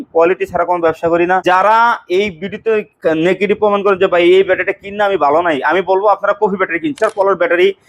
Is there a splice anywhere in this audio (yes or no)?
yes